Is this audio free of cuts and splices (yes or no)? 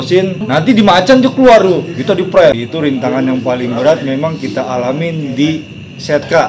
no